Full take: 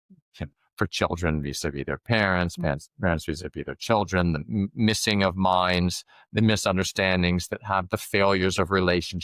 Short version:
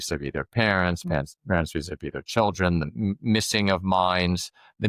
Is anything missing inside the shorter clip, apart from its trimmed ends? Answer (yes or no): no